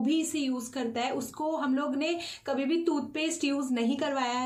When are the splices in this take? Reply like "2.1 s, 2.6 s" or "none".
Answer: none

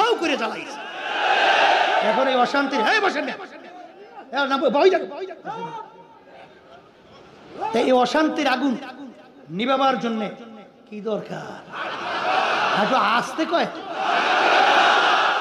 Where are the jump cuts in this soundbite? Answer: none

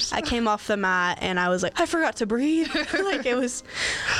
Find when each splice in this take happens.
1.7 s

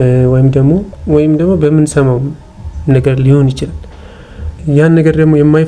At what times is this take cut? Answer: 0.9 s, 4.6 s

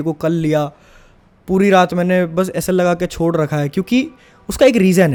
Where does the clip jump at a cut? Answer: none

